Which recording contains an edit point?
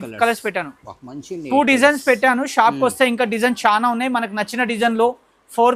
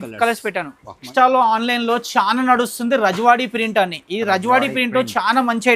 second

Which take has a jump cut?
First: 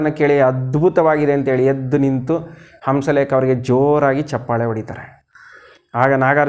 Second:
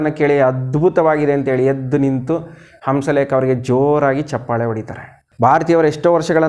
second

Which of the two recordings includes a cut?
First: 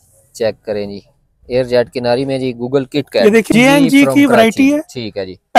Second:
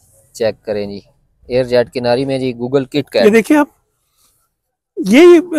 first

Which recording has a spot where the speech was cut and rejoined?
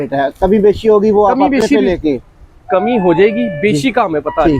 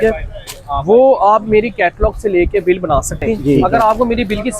second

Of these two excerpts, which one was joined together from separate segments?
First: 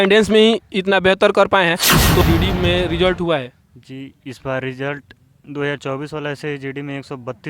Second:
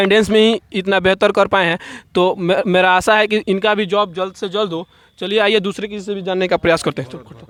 first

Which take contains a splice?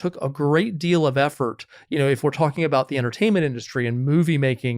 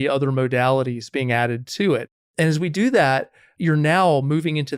second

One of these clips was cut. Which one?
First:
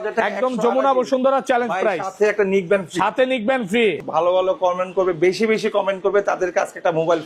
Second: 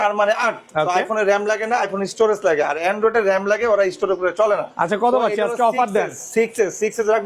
first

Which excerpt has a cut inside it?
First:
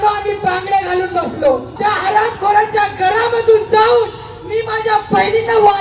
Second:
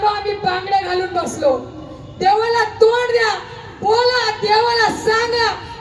first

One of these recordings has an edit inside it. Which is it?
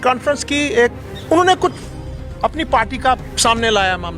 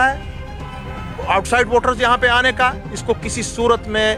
first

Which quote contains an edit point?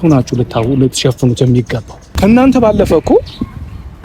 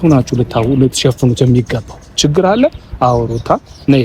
first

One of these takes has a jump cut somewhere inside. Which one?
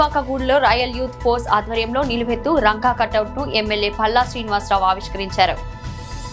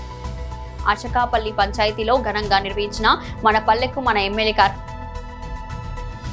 second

